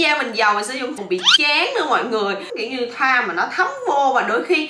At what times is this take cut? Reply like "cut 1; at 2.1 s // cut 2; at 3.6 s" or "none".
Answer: cut 1; at 1.0 s